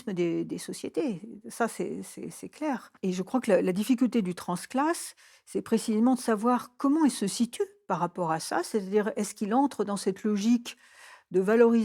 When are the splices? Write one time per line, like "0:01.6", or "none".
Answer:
none